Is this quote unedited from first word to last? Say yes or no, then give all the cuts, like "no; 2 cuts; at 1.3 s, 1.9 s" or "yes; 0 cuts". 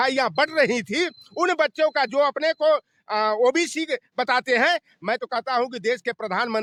yes; 0 cuts